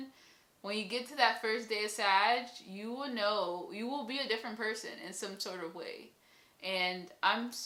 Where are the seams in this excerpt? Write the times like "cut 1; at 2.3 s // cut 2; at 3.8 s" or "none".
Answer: none